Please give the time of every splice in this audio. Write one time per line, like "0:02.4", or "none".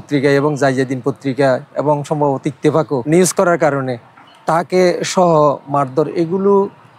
0:03.0

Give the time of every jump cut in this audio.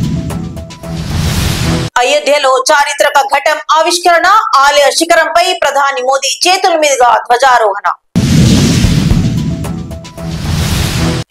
0:01.9

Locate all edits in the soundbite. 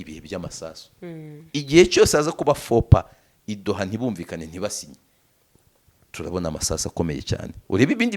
none

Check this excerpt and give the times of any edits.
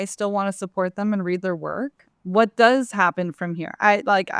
0:02.0

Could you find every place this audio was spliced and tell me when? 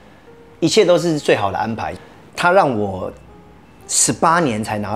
0:01.9

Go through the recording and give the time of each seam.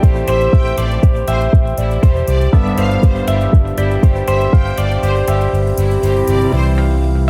none

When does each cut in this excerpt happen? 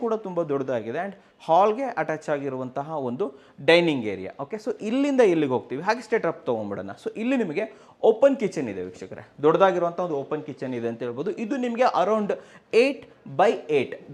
none

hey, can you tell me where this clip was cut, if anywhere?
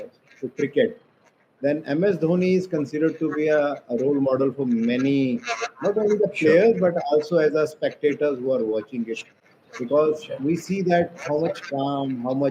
none

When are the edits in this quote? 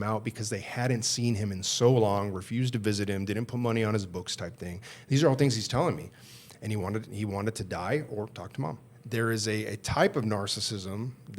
0:08.9

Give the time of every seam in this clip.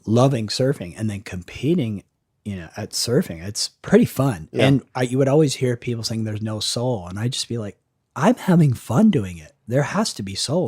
0:03.7
0:09.6

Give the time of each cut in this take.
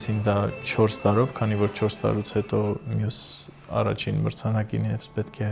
none

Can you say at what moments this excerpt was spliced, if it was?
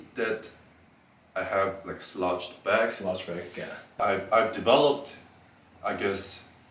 0:04.0

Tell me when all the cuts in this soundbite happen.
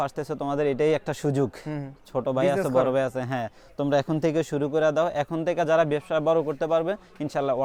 none

